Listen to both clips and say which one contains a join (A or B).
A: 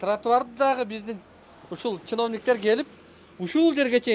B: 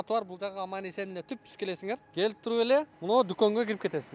B